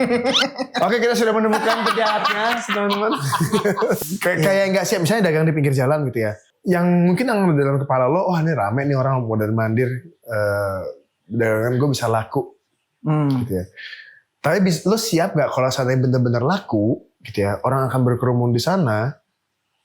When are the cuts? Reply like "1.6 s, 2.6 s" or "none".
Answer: 4.0 s, 6.5 s